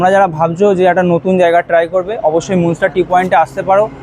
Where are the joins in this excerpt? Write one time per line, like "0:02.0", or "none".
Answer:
none